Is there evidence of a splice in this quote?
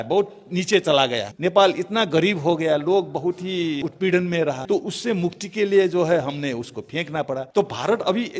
yes; 4 cuts; at 1.3 s, 3.8 s, 4.6 s, 7.5 s

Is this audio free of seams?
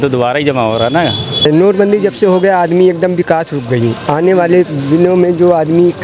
no; 1 cut; at 1.4 s

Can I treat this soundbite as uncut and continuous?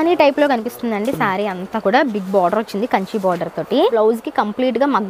no; 1 cut; at 3.9 s

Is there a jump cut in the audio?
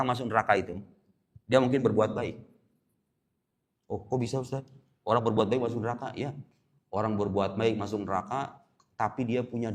no; 0 cuts

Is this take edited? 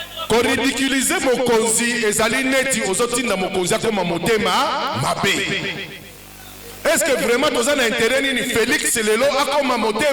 no; 0 cuts

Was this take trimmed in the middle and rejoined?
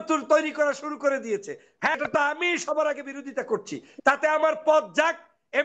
yes; 1 cut; at 2.0 s

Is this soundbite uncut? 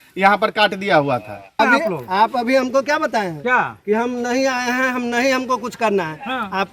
no; 1 cut; at 1.6 s

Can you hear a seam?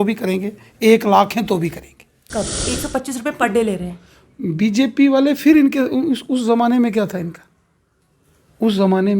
yes; 1 cut; at 2.6 s

